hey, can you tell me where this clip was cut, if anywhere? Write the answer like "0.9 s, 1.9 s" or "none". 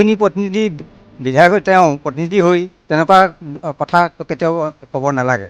4.3 s